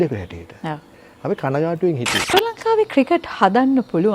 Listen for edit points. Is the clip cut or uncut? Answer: cut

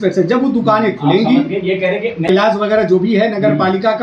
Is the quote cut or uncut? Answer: cut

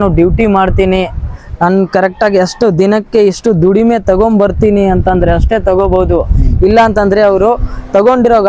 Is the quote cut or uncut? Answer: uncut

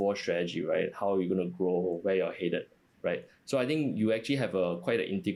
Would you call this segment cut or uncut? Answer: uncut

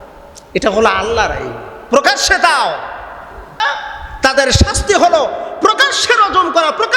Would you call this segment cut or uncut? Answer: cut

